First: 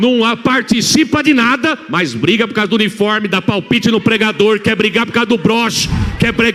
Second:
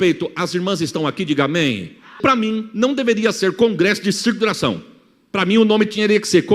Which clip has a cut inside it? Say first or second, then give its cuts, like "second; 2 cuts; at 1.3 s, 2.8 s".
second; 1 cut; at 2.2 s